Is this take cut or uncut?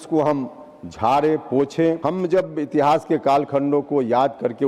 cut